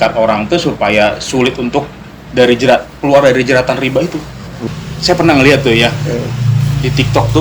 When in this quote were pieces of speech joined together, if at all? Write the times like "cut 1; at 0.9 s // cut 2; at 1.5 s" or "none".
cut 1; at 4.6 s